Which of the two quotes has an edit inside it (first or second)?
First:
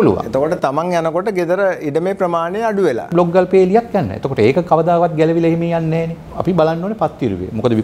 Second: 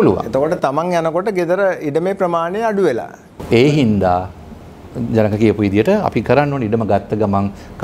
first